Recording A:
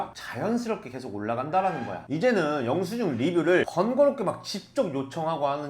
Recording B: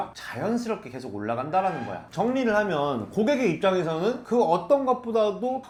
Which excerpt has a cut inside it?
A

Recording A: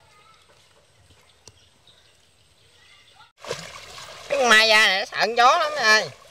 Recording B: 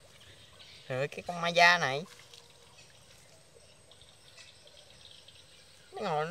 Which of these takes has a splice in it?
A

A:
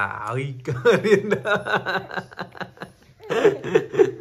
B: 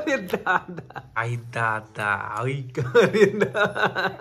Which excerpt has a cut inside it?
B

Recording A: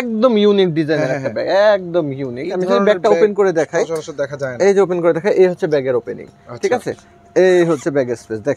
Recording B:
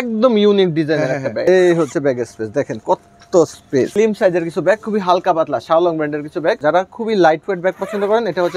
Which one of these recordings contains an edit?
B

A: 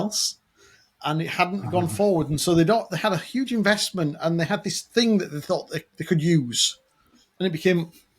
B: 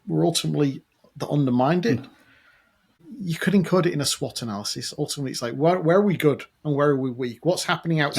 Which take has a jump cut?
B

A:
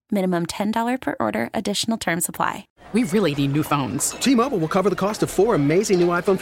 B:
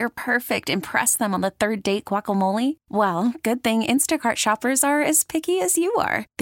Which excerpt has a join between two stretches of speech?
A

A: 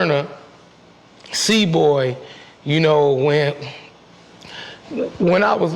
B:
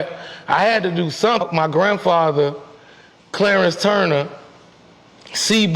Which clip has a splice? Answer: B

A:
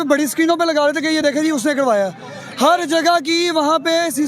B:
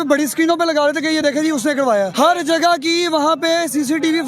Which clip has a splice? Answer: B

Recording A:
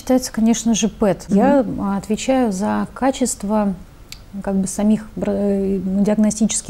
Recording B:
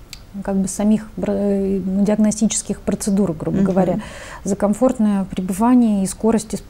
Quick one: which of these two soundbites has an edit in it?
A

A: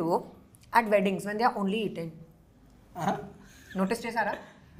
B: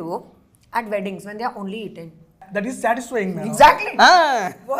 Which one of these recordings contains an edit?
B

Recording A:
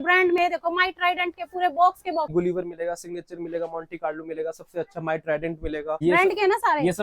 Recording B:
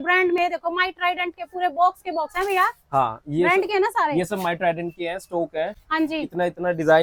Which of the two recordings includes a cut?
A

